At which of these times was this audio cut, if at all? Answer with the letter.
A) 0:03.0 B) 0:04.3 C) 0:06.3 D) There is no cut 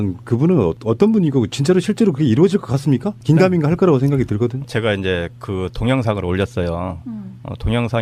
D